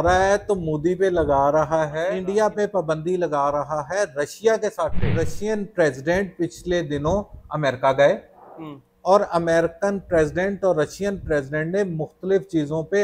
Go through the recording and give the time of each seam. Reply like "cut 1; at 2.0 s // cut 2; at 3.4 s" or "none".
cut 1; at 2.2 s // cut 2; at 5.3 s